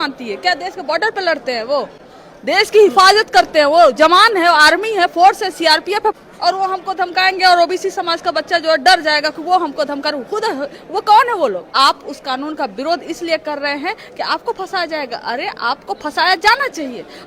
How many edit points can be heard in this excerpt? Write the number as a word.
two